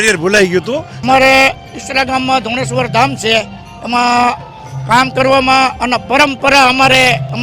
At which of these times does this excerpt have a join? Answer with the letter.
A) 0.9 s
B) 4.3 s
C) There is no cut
A